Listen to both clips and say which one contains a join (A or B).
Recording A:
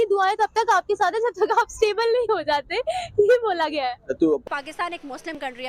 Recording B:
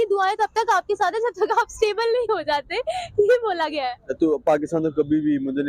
A